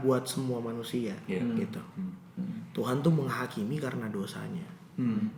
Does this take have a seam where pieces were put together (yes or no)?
no